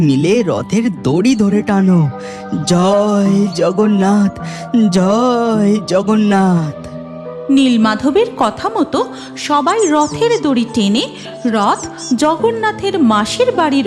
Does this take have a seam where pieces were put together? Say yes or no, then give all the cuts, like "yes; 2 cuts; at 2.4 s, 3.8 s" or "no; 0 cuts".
no; 0 cuts